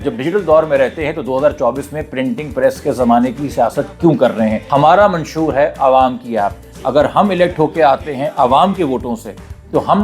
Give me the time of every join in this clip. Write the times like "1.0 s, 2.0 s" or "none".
4.6 s